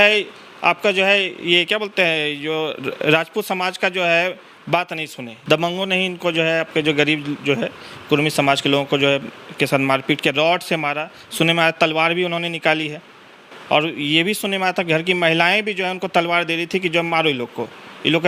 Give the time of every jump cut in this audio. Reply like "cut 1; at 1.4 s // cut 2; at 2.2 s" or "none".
cut 1; at 5.3 s